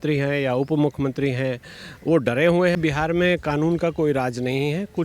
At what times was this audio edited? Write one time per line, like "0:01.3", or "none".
0:02.8